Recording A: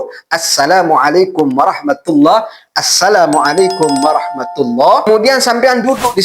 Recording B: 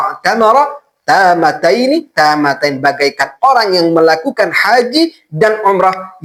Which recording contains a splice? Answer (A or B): A